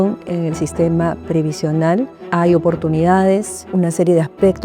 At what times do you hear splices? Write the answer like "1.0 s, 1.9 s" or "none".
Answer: 2.2 s, 3.6 s